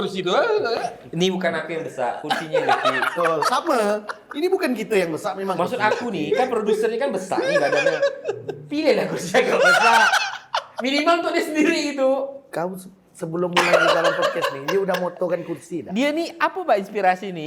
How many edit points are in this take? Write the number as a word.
zero